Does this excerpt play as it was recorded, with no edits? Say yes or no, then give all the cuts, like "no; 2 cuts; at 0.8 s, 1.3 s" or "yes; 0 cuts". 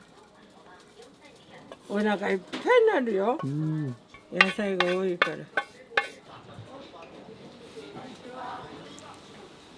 no; 1 cut; at 6.2 s